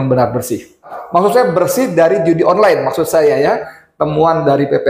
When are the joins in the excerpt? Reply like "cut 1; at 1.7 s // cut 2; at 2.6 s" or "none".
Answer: cut 1; at 1.0 s // cut 2; at 3.8 s